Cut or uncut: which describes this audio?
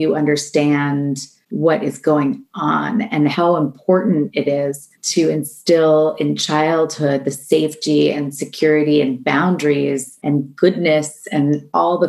cut